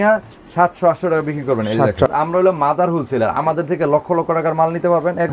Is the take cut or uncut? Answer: cut